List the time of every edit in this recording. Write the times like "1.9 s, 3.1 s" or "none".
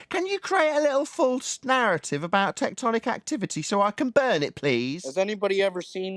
5.0 s